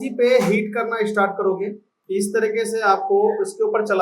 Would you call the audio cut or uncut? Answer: cut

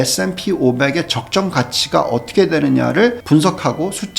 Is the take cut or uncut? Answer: cut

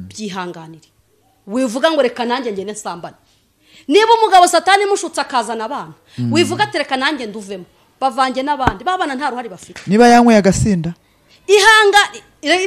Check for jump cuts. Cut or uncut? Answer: uncut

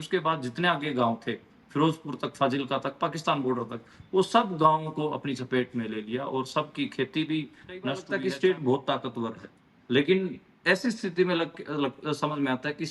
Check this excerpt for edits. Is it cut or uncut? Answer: cut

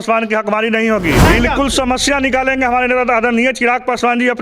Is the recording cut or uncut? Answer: cut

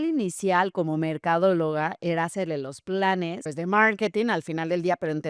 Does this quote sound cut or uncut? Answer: cut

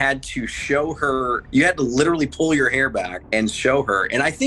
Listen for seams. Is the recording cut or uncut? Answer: cut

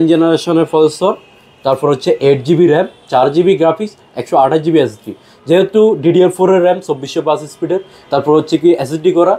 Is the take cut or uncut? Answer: uncut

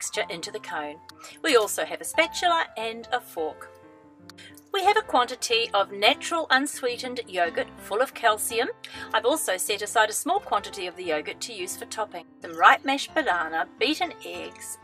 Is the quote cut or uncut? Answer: cut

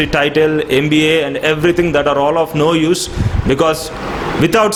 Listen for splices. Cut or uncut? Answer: uncut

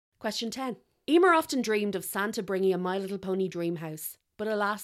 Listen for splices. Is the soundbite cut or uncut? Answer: cut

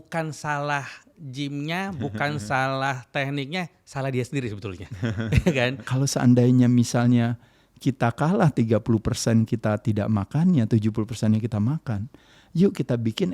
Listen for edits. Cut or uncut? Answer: cut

